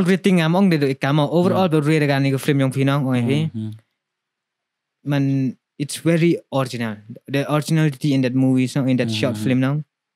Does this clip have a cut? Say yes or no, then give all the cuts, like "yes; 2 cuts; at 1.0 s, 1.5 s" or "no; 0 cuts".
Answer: no; 0 cuts